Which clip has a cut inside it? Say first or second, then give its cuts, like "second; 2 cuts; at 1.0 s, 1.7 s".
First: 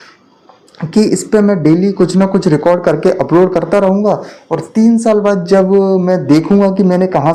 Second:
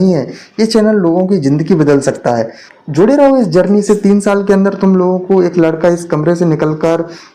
second; 1 cut; at 2.6 s